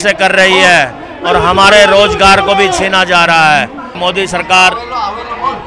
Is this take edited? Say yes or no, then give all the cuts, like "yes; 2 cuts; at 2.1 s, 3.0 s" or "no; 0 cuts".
yes; 1 cut; at 4.0 s